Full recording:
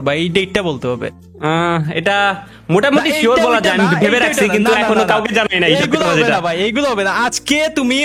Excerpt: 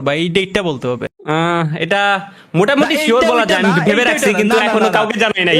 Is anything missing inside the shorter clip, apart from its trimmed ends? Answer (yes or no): yes